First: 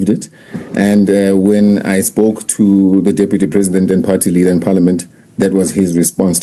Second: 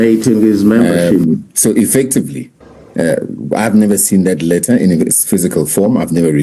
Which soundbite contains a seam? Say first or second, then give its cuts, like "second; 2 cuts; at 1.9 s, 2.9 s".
second; 1 cut; at 1.0 s